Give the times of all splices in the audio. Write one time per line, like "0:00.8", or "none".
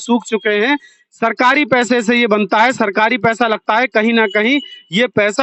none